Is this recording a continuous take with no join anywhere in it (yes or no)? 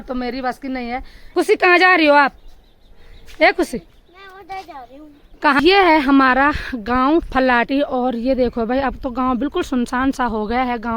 no